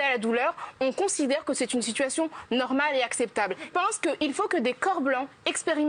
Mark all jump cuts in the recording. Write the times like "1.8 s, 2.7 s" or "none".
3.7 s